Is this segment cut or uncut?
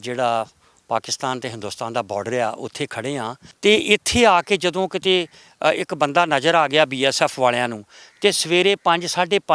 cut